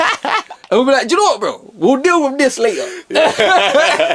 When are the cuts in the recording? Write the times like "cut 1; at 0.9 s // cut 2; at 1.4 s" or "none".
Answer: none